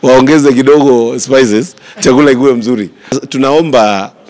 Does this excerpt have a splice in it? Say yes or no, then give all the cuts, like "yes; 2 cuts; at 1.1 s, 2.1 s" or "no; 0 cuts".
yes; 1 cut; at 3.2 s